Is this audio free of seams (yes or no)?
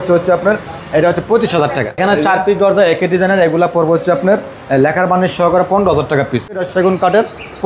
no